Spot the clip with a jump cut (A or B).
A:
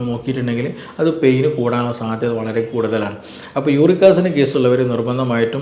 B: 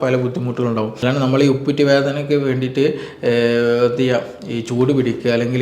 B